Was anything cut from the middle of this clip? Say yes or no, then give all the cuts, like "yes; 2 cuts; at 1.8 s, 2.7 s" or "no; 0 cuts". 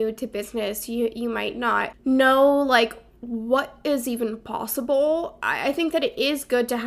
yes; 2 cuts; at 1.9 s, 5.4 s